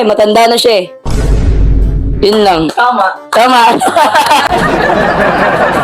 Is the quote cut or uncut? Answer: cut